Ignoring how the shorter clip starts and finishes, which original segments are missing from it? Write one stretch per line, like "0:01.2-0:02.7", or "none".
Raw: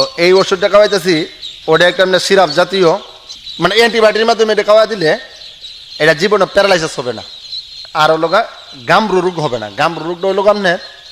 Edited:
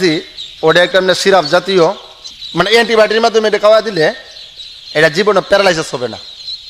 none